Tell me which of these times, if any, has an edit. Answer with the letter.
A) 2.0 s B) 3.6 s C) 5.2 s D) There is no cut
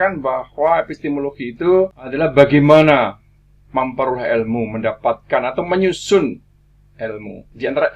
A